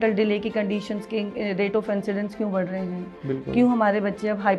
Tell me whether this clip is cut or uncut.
uncut